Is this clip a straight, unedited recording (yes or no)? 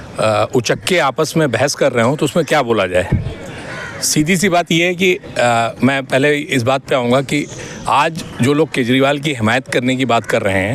yes